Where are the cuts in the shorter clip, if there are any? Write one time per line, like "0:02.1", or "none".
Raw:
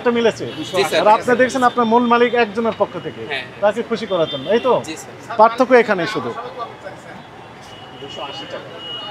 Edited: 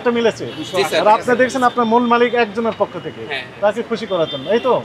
none